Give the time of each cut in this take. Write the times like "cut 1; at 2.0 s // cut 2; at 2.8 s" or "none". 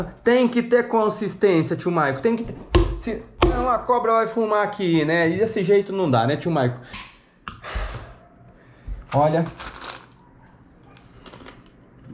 cut 1; at 6.9 s

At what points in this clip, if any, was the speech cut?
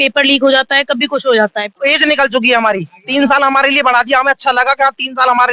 cut 1; at 1.7 s

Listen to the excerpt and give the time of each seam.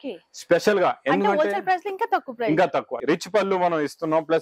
cut 1; at 3.0 s

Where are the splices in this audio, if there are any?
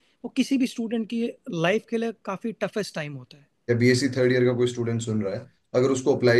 cut 1; at 3.5 s

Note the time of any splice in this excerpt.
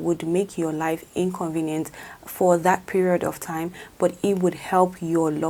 none

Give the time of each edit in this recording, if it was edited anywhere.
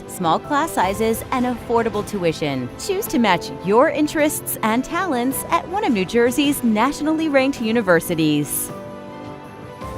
cut 1; at 8.5 s

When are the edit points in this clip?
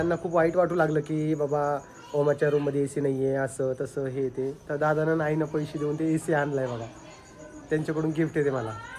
none

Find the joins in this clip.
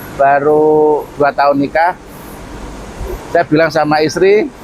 none

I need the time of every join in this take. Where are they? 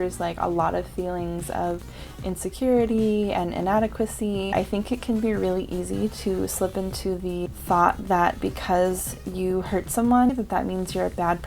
cut 1; at 4.5 s // cut 2; at 7.6 s // cut 3; at 10.3 s

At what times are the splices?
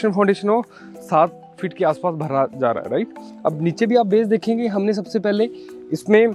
none

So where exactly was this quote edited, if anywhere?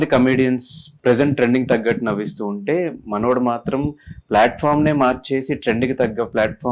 cut 1; at 0.9 s

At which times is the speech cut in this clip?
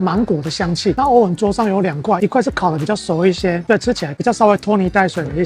cut 1; at 0.9 s

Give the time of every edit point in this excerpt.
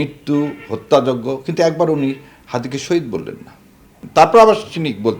cut 1; at 3.9 s

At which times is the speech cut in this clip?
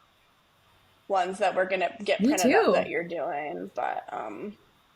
none

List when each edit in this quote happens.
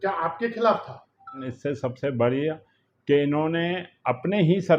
cut 1; at 1.5 s

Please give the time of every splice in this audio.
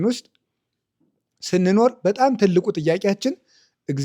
none

